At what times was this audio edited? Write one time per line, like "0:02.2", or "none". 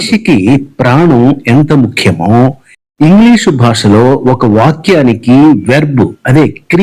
none